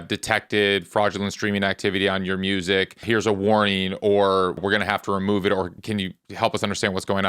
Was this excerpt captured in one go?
no; 3 cuts; at 3.0 s, 4.6 s, 5.7 s

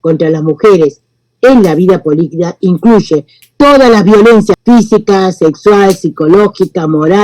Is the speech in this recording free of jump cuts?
no; 1 cut; at 4.6 s

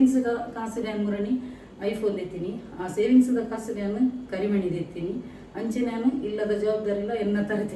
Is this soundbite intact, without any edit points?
yes; 0 cuts

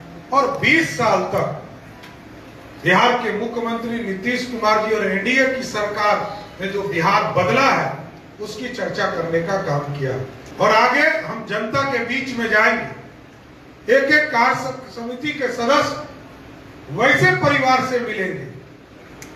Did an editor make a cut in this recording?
yes; 1 cut; at 10.4 s

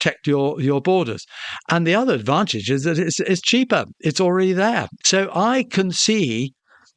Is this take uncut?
no; 1 cut; at 4.9 s

